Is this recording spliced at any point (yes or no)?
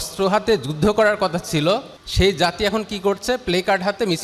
yes